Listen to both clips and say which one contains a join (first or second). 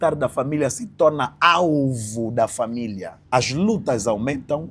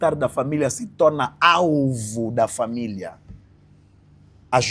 first